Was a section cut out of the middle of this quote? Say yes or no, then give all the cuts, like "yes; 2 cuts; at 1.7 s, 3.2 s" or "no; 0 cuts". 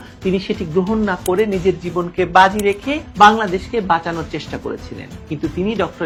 no; 0 cuts